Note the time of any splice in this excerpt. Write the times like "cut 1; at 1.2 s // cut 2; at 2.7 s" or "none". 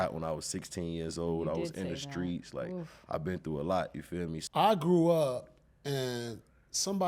cut 1; at 4.4 s